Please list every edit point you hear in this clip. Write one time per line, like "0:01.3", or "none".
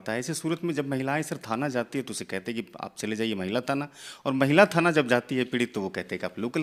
none